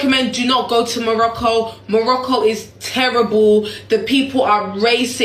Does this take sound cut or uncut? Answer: uncut